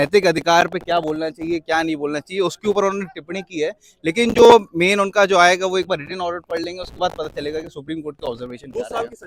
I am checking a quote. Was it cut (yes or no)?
no